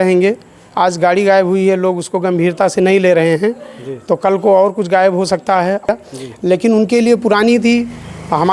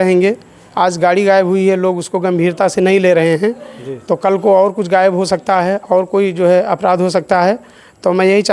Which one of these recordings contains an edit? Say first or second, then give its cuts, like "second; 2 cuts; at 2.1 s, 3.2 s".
first; 1 cut; at 5.9 s